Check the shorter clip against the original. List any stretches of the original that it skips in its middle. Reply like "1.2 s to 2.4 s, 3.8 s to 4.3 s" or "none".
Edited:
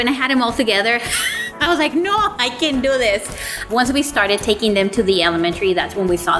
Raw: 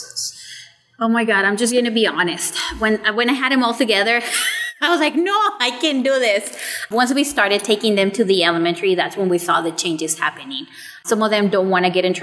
none